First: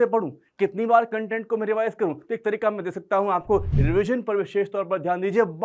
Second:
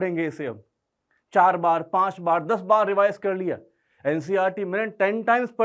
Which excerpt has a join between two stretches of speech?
first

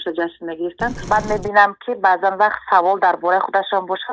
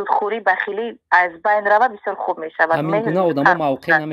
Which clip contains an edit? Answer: first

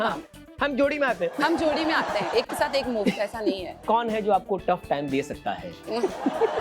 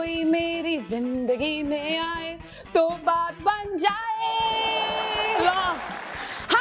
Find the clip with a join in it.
first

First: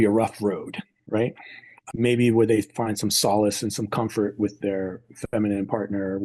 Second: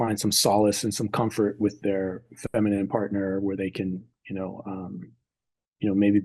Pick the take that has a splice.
first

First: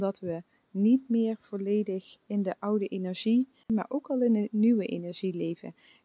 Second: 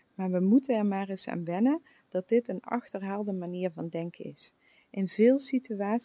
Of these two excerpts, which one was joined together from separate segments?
first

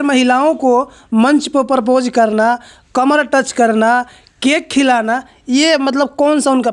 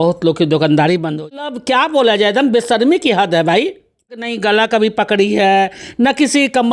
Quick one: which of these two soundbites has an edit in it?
second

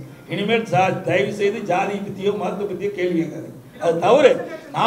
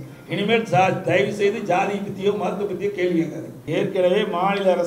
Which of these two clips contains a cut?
second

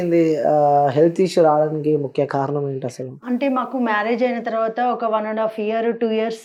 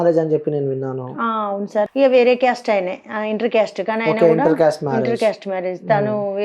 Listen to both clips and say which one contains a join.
second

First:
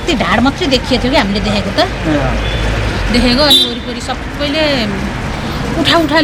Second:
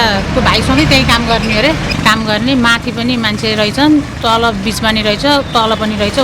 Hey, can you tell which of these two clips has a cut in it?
second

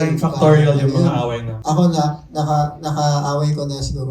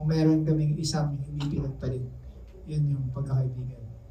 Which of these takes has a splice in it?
first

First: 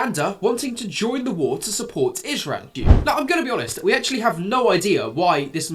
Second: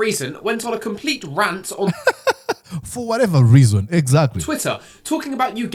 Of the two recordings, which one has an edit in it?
first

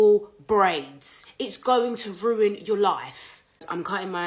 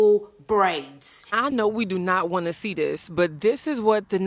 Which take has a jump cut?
second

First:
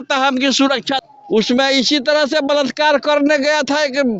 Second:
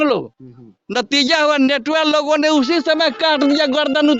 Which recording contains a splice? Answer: first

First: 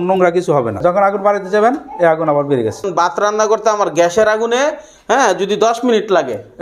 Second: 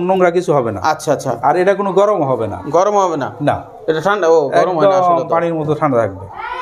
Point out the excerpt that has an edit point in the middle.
first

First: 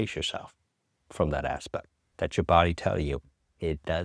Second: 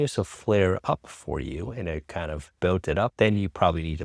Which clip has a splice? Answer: second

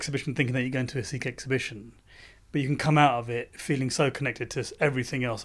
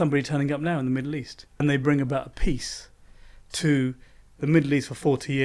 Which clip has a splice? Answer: second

